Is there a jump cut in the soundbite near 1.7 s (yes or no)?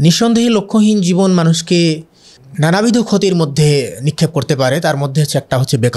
no